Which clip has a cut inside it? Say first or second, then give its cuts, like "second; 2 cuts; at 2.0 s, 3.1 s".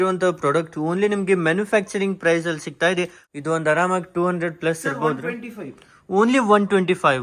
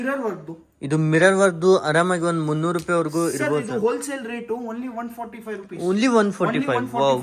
first; 1 cut; at 3.2 s